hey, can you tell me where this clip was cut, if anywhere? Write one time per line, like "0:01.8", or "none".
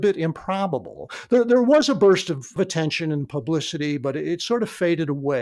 0:02.5